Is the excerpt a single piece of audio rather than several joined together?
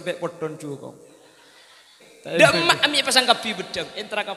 no; 1 cut; at 2.4 s

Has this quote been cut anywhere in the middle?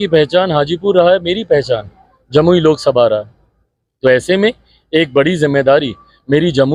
no; 0 cuts

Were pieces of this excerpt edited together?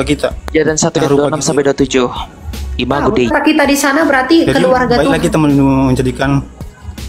yes; 1 cut; at 3.3 s

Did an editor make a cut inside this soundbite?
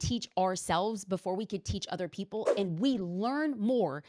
no; 0 cuts

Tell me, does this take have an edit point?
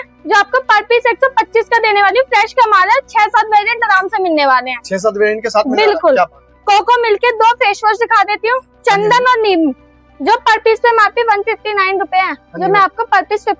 no; 0 cuts

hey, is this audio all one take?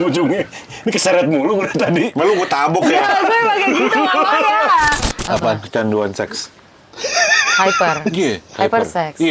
no; 1 cut; at 5.1 s

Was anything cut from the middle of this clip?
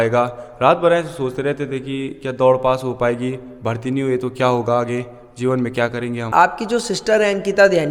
yes; 1 cut; at 6.3 s

